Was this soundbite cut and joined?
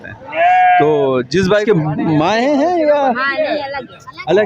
yes; 1 cut; at 1.6 s

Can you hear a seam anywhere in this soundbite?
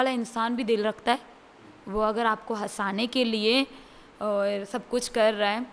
no; 0 cuts

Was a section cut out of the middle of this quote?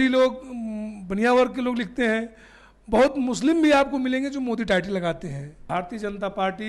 yes; 1 cut; at 5.6 s

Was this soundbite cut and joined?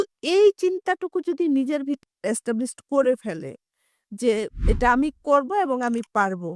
no; 0 cuts

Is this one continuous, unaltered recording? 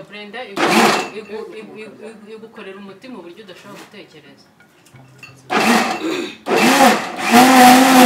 yes; 0 cuts

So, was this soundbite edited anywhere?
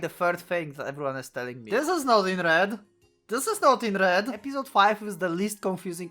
yes; 2 cuts; at 1.6 s, 4.4 s

